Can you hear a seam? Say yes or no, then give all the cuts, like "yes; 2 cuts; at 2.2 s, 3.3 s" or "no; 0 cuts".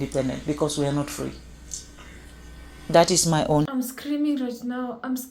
no; 0 cuts